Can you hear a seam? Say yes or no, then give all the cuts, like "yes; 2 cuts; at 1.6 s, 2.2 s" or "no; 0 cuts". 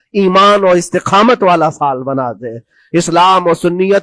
no; 0 cuts